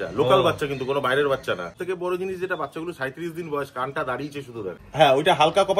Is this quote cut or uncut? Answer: cut